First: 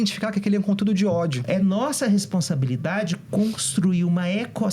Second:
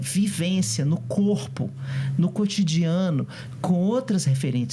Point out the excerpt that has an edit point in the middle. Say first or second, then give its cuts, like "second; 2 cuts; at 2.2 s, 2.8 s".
first; 1 cut; at 1.4 s